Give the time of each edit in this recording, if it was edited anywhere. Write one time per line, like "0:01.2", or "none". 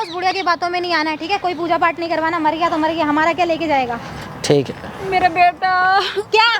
none